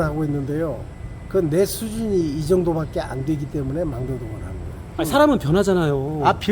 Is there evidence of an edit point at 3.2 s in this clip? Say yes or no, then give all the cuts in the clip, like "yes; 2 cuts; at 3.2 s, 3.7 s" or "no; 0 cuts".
no; 1 cut; at 4.9 s